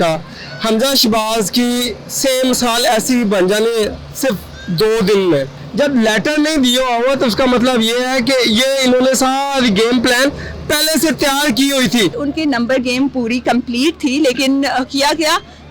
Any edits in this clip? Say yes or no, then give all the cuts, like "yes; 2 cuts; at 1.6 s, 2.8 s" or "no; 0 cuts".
yes; 2 cuts; at 5.6 s, 12.2 s